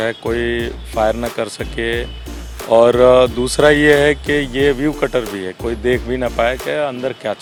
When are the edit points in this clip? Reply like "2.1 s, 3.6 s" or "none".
none